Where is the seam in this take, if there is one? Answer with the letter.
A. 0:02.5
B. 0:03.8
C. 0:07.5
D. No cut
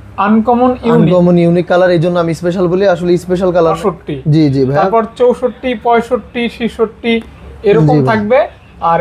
B